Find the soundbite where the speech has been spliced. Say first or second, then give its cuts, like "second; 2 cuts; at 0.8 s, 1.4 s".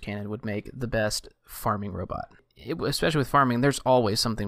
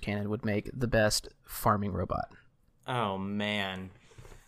first; 1 cut; at 2.5 s